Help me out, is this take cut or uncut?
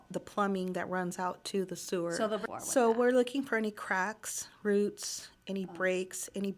cut